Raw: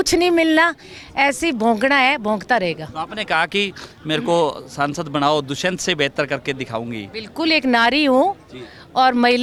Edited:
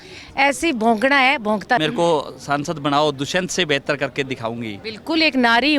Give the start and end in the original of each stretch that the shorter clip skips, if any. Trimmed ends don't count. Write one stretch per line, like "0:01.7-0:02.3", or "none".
0:02.6-0:04.1